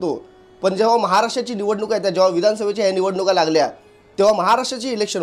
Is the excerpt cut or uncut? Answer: uncut